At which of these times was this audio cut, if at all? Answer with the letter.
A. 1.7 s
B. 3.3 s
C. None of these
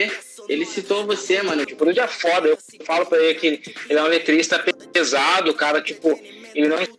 A